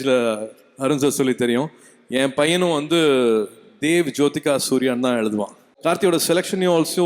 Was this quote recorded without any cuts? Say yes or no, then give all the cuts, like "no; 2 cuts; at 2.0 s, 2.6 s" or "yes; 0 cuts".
no; 1 cut; at 5.7 s